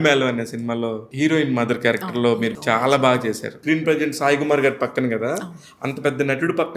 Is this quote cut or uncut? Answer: cut